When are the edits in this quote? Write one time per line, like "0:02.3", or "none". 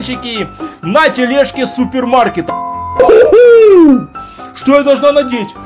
0:03.0